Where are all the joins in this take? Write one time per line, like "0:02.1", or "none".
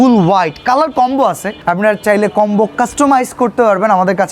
0:01.5